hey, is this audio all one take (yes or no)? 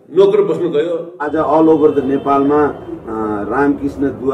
no